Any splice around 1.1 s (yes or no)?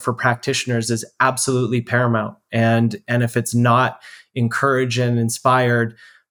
no